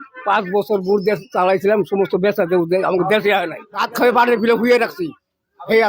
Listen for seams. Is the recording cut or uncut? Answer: cut